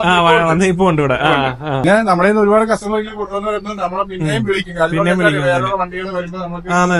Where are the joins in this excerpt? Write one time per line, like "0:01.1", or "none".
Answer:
0:01.8

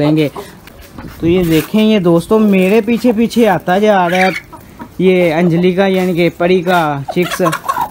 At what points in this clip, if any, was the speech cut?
none

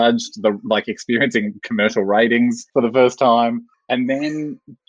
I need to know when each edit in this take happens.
0:02.6
0:03.7

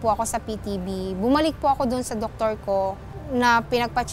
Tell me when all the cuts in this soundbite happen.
0:03.1

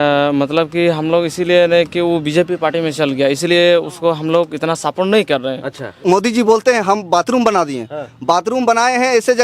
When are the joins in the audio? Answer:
0:05.9

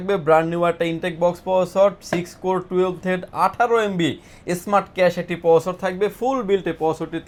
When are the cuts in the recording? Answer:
none

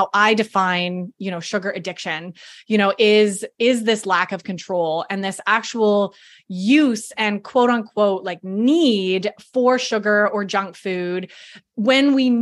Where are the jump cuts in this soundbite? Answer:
none

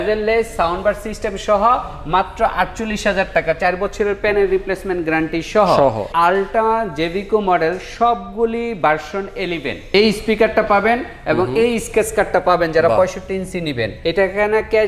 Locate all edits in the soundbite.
0:06.1
0:09.9
0:13.9

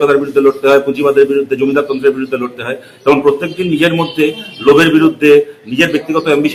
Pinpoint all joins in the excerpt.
none

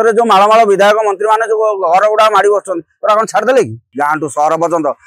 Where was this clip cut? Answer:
0:03.9

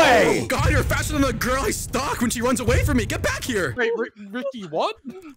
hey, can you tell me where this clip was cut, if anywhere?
none

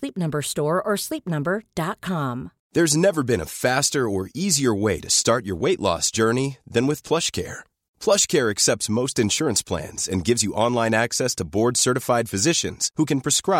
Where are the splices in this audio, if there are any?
0:02.5

